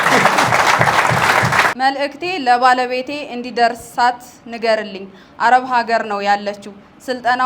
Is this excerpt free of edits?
no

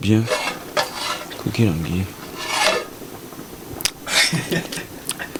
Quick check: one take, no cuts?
yes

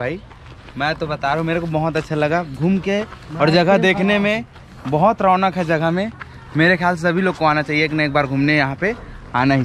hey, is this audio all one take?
yes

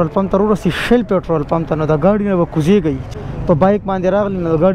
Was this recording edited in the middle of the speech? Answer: yes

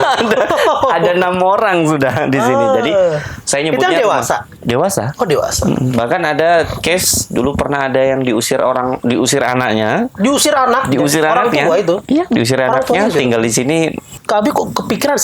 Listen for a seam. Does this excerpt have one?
yes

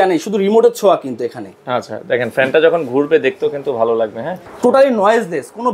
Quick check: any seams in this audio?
yes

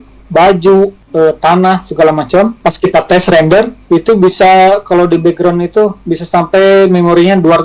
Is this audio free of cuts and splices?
no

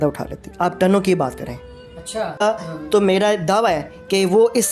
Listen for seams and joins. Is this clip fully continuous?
no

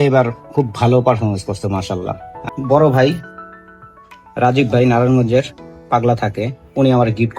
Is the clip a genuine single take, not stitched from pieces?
no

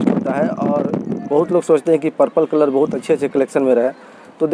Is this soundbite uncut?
yes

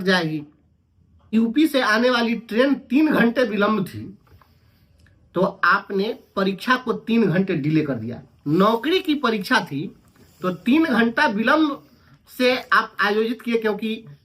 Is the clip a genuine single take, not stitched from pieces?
no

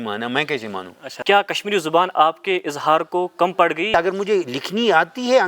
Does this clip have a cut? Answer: yes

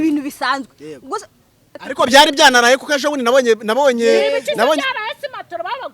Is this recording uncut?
no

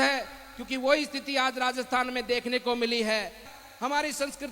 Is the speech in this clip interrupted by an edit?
yes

